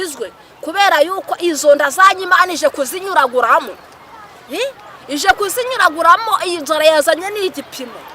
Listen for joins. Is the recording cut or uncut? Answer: uncut